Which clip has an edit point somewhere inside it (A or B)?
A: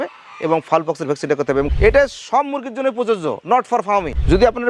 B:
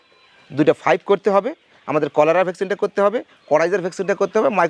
A